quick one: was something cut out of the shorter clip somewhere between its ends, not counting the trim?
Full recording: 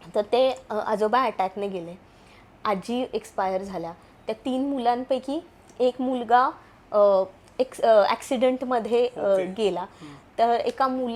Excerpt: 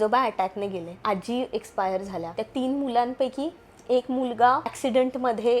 yes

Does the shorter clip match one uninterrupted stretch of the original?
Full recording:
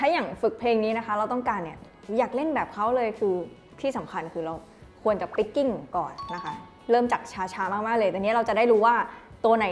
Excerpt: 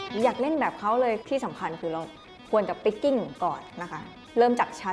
no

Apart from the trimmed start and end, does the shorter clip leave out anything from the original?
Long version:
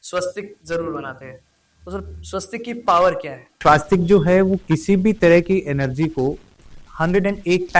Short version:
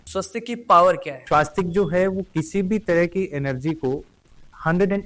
yes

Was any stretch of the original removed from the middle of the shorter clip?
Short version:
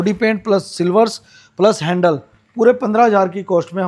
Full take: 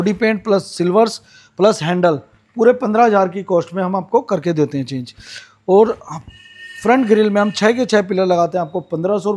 no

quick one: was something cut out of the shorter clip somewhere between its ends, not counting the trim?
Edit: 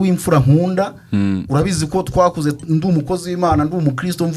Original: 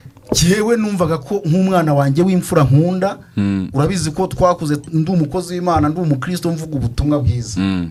no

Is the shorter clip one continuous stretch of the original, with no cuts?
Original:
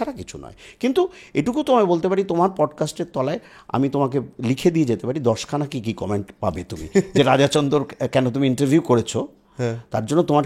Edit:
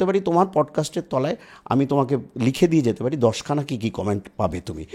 yes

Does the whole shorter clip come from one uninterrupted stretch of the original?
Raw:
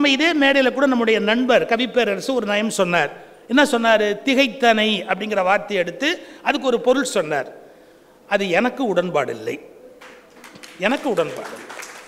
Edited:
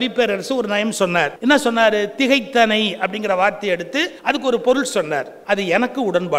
no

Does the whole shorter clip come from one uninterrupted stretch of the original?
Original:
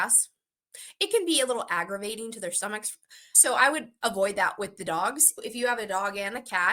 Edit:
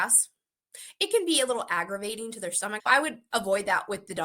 no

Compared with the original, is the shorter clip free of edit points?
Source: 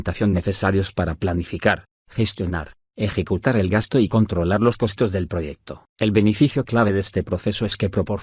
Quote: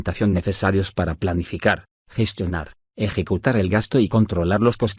yes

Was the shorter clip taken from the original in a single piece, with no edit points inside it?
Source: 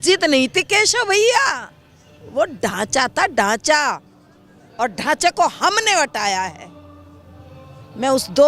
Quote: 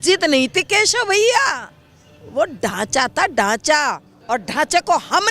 no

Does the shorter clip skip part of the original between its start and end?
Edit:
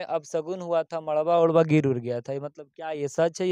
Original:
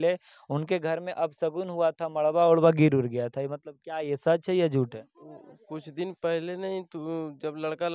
no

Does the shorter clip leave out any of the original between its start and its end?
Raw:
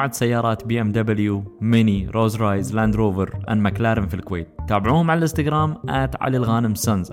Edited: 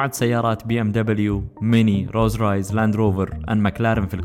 no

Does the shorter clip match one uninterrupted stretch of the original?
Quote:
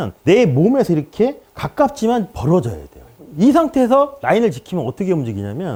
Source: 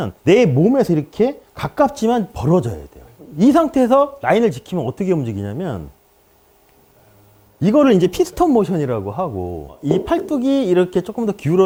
yes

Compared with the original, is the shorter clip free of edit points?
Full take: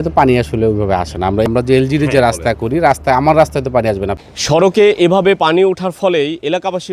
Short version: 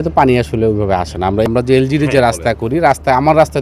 yes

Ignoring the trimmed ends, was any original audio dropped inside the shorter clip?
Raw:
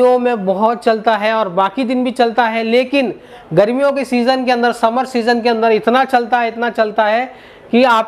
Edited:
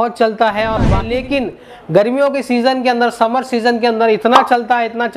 yes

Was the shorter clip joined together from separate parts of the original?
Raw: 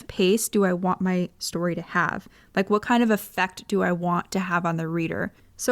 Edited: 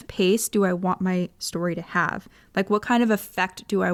no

